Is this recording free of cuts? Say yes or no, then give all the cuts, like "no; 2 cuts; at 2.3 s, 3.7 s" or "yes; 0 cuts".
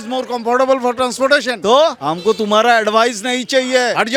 yes; 0 cuts